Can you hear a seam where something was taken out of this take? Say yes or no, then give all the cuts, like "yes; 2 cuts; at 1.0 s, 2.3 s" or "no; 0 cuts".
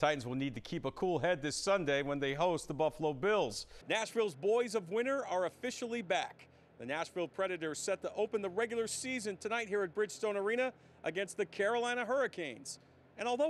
yes; 1 cut; at 3.7 s